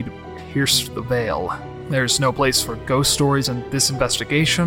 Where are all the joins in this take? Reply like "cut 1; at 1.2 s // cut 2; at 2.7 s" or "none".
cut 1; at 1.7 s // cut 2; at 3.5 s